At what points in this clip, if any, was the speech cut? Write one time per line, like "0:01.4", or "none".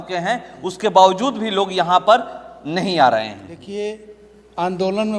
0:03.5